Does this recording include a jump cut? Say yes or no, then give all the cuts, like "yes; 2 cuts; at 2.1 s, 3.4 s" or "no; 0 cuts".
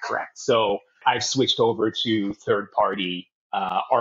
yes; 1 cut; at 1.0 s